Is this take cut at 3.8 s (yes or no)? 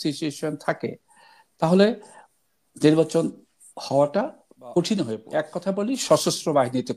no